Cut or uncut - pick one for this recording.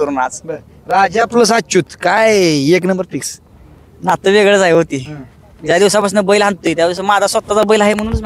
uncut